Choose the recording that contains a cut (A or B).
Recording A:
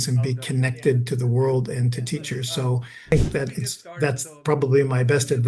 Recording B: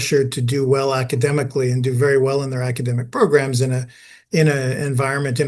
A